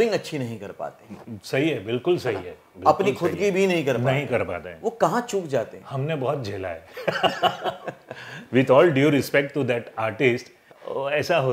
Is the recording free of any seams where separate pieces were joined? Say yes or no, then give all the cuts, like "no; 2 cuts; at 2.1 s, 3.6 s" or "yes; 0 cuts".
yes; 0 cuts